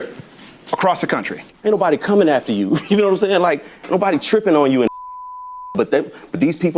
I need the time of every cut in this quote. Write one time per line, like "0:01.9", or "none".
0:03.4